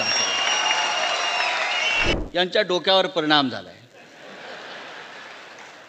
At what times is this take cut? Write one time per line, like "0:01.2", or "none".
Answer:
0:02.1